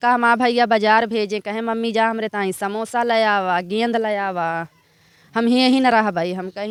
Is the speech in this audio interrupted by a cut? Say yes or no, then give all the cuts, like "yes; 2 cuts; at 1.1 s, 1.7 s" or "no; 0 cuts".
no; 0 cuts